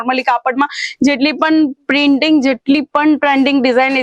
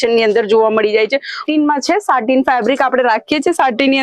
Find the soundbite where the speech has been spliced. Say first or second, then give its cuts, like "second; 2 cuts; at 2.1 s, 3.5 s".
second; 1 cut; at 1.4 s